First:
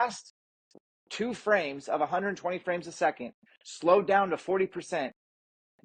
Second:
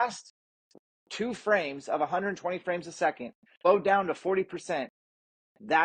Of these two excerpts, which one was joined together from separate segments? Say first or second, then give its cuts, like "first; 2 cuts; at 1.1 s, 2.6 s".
second; 1 cut; at 3.5 s